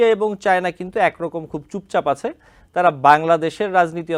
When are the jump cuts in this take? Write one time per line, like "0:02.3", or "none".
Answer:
none